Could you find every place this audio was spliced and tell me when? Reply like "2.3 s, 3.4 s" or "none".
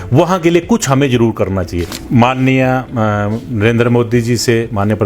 2.0 s